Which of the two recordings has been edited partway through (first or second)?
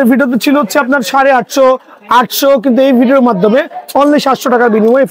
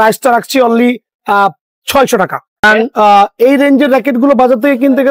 second